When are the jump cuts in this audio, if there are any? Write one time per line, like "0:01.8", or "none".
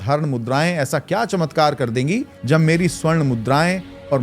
0:02.3